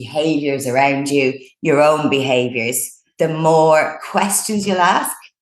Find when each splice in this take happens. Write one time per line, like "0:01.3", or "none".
0:03.0